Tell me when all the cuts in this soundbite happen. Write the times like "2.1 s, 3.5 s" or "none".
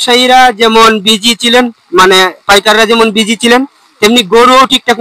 none

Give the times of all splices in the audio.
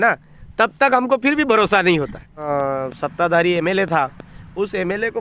2.4 s

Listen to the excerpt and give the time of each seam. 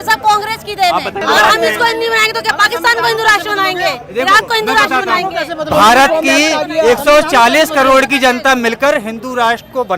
1.2 s

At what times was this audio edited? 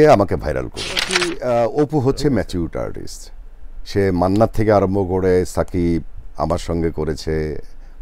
1.2 s

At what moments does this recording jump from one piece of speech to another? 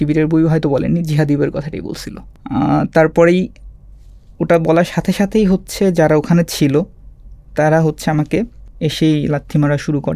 8.6 s

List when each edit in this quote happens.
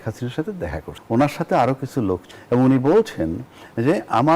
0.9 s, 2.3 s

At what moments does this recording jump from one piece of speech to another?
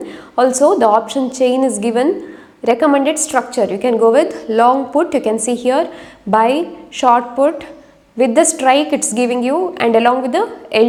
none

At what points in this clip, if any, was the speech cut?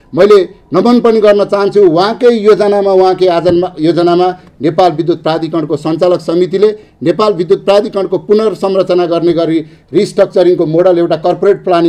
none

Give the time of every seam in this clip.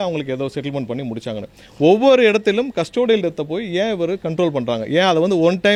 none

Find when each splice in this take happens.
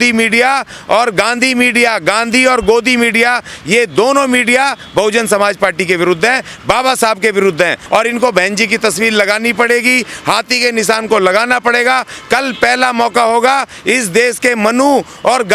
7.8 s

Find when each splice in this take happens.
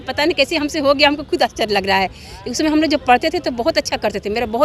none

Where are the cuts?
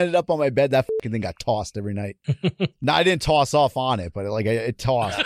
2.2 s

